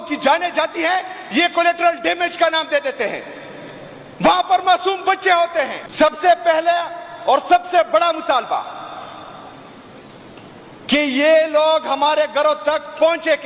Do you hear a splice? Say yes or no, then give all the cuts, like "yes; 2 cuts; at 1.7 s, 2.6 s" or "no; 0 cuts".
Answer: yes; 1 cut; at 5.8 s